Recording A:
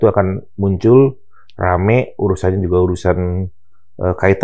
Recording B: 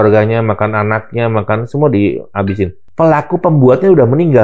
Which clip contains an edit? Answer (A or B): B